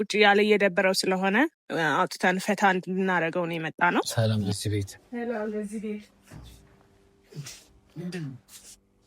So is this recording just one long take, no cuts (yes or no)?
no